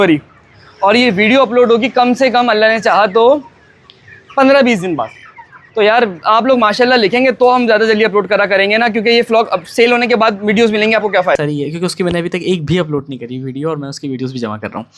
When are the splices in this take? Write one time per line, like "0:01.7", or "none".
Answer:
0:11.4